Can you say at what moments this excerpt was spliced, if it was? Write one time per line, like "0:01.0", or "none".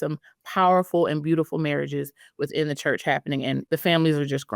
0:03.6